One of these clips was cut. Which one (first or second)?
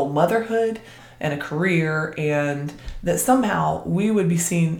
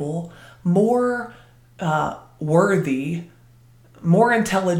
first